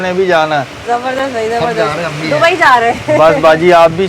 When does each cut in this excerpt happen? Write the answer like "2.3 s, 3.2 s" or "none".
none